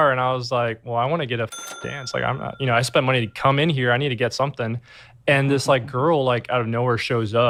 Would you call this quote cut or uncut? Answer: uncut